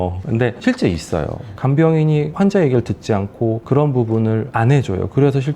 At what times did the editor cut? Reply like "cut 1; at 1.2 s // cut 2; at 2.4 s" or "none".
cut 1; at 1.5 s

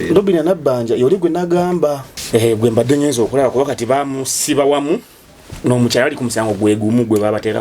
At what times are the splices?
cut 1; at 2.1 s

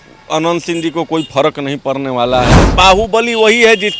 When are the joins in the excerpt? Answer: cut 1; at 2.6 s

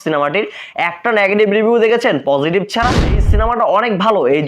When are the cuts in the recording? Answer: cut 1; at 2.9 s

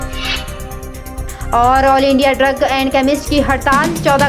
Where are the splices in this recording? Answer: none

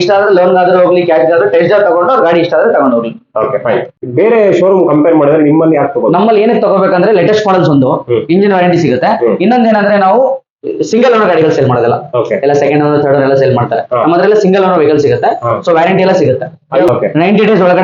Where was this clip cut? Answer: cut 1; at 3.9 s // cut 2; at 16.9 s

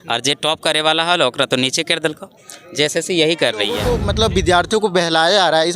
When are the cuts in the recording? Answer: cut 1; at 3.9 s

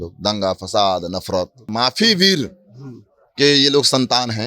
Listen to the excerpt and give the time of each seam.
cut 1; at 1.6 s

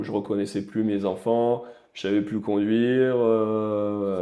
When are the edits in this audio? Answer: none

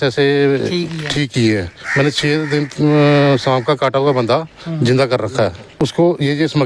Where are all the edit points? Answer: cut 1; at 5.7 s

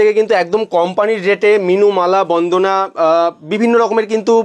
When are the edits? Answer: none

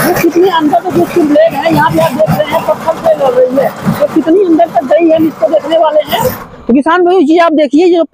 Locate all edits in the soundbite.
none

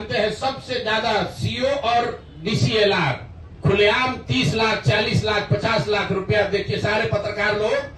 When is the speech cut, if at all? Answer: cut 1; at 3.5 s

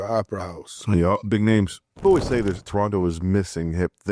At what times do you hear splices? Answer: cut 1; at 1.9 s

